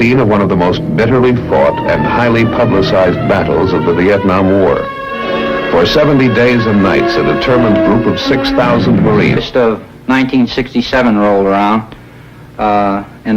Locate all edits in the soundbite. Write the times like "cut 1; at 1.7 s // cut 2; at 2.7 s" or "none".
none